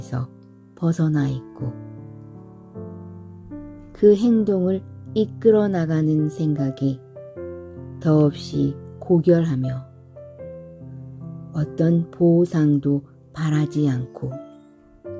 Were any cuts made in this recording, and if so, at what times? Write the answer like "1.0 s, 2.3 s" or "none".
10.3 s, 11.5 s, 14.3 s